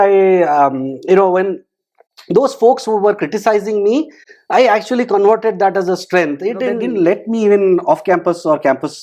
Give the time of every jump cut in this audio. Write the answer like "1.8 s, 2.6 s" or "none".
6.8 s